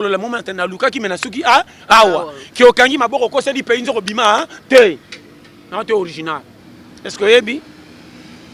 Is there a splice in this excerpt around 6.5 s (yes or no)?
yes